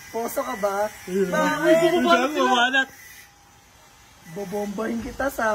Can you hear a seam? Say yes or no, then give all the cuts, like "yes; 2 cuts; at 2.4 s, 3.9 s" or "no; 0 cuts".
no; 0 cuts